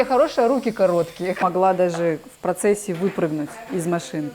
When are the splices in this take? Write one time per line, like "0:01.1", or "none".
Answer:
0:01.4